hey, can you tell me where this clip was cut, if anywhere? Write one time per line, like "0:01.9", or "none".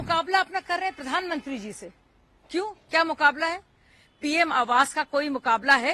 none

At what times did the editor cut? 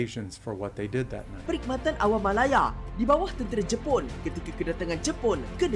0:01.4

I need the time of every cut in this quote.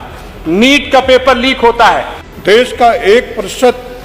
0:02.5

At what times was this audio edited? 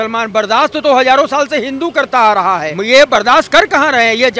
0:02.7

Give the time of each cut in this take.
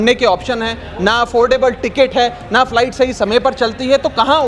none

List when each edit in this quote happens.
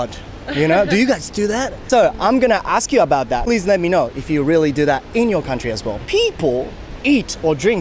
0:03.4
0:05.9

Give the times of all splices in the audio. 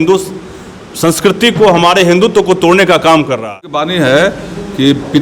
0:03.8

